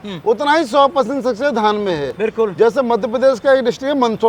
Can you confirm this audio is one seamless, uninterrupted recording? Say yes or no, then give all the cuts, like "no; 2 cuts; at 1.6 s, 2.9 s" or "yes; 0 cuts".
yes; 0 cuts